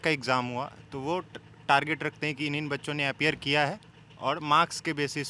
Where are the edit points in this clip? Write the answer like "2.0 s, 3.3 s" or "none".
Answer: none